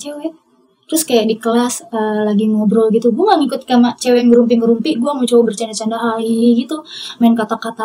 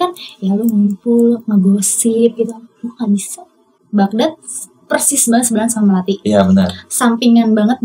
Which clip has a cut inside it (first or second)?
second